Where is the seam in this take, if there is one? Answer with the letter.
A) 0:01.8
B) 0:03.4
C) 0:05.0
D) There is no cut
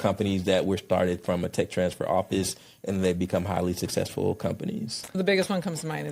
C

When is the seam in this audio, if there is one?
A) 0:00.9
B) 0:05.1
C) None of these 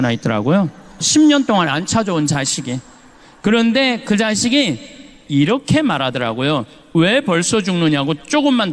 B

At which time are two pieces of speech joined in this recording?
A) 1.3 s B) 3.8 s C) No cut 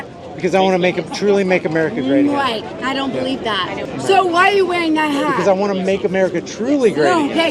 B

